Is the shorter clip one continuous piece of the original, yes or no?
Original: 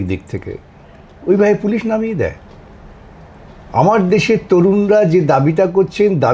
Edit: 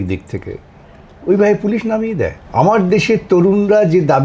no